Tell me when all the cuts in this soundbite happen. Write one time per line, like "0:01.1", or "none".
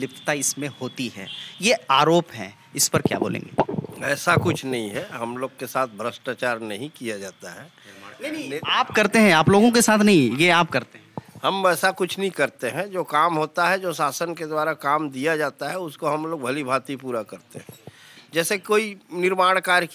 none

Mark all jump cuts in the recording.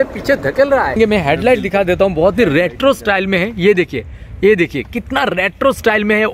0:00.9

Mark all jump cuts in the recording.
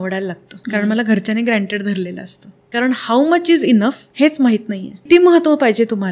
0:02.6
0:05.1

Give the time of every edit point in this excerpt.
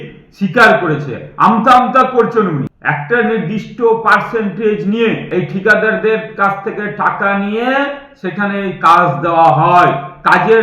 0:02.8
0:05.2

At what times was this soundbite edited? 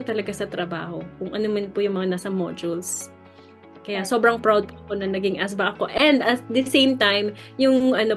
none

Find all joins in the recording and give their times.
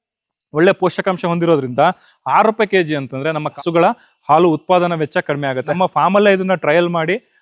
0:03.5
0:05.7

